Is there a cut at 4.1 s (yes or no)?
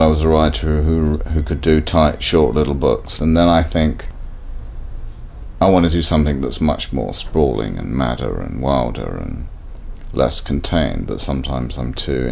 yes